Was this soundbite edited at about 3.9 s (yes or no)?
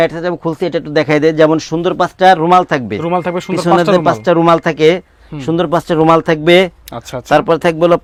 no